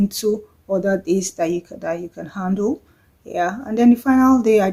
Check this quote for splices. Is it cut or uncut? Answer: uncut